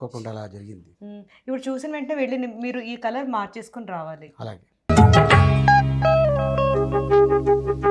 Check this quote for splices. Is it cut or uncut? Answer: cut